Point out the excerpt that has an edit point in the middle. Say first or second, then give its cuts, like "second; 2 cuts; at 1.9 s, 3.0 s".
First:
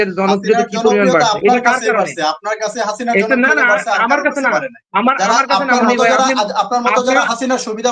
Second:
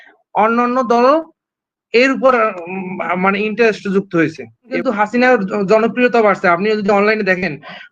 second; 1 cut; at 4.7 s